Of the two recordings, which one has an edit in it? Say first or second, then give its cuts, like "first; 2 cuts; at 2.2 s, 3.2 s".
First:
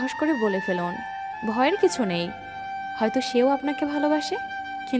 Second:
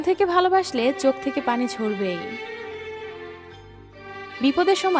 second; 2 cuts; at 2.2 s, 4.1 s